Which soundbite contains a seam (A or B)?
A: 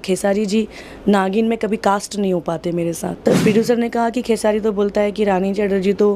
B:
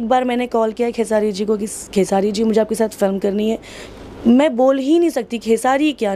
A